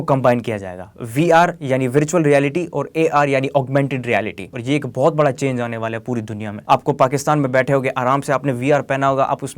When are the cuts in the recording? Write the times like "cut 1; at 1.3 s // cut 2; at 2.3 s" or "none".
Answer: cut 1; at 4.5 s // cut 2; at 6.5 s